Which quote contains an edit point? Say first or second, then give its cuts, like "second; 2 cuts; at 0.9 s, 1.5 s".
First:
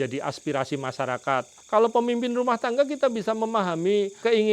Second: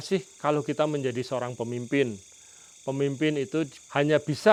first; 1 cut; at 1.6 s